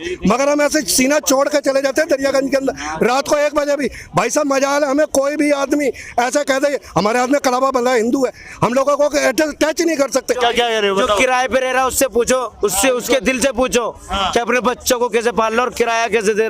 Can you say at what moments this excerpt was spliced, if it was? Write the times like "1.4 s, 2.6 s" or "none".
10.4 s